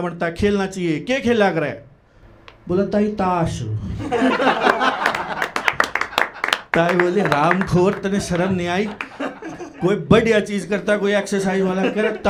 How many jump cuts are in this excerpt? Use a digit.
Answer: 0